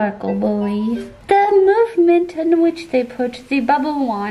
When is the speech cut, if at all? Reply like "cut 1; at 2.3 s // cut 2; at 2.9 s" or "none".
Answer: cut 1; at 1.1 s